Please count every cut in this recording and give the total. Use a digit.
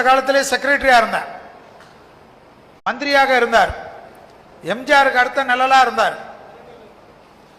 1